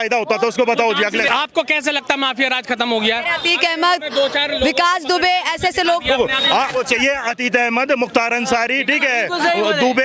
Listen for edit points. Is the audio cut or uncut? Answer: cut